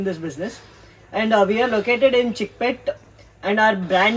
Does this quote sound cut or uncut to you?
uncut